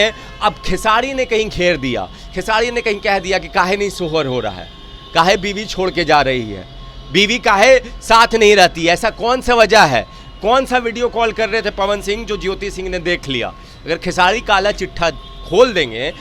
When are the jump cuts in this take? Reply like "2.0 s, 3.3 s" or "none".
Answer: none